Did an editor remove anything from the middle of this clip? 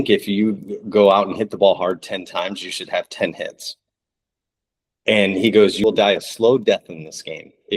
yes; 2 cuts; at 3.1 s, 5.8 s

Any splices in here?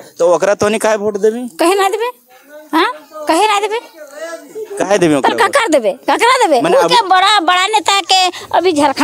no; 0 cuts

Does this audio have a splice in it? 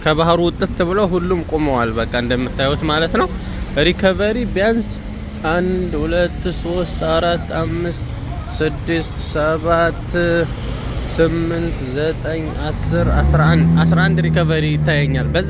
no; 0 cuts

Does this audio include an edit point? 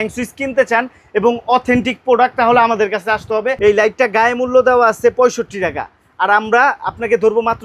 yes; 1 cut; at 3.6 s

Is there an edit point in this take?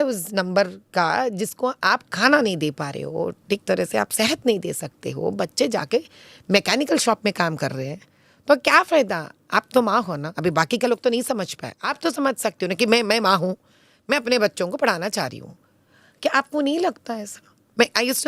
no; 0 cuts

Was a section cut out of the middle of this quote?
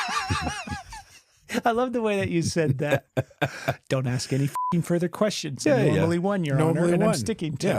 no; 0 cuts

